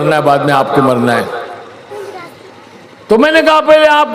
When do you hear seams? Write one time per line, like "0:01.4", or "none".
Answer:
0:01.9